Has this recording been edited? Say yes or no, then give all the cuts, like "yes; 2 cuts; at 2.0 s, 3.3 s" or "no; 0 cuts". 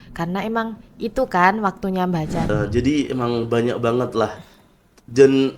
yes; 1 cut; at 2.5 s